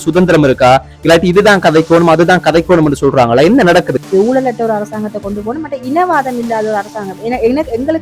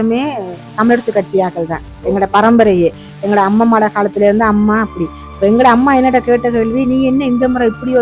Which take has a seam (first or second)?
first